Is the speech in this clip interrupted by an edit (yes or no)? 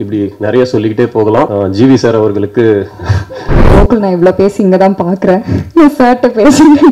yes